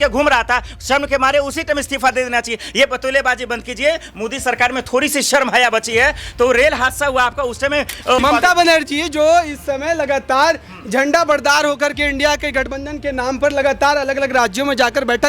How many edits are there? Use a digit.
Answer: 1